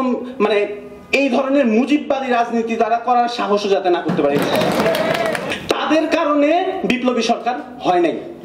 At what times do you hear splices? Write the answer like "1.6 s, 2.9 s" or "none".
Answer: 5.5 s